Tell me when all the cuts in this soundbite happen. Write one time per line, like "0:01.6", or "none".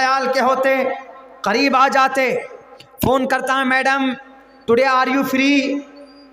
none